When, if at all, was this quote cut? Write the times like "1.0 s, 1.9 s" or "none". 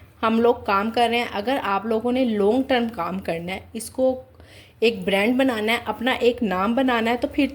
none